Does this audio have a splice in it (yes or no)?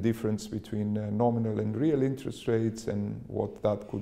no